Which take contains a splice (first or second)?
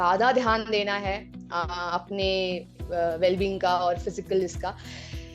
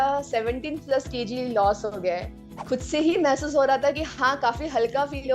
second